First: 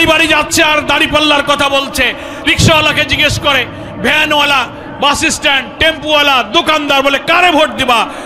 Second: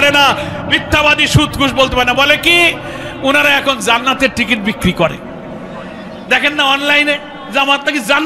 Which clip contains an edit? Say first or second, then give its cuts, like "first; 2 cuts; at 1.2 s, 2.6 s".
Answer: second; 1 cut; at 7.3 s